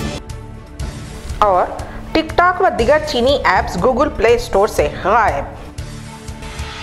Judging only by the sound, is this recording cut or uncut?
uncut